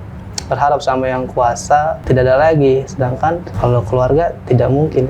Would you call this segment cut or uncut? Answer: cut